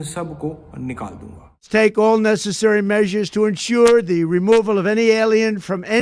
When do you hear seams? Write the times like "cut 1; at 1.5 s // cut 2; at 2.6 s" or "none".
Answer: cut 1; at 1.7 s